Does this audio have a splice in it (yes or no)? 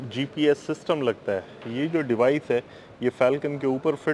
no